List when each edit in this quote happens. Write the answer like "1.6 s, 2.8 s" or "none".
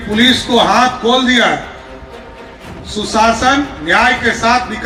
none

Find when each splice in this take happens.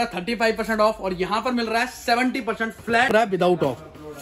3.1 s

